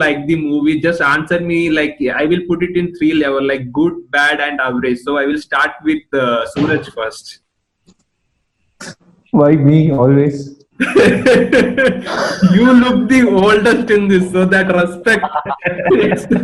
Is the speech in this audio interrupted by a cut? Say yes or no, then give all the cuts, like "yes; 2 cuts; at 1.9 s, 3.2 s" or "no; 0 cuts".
no; 0 cuts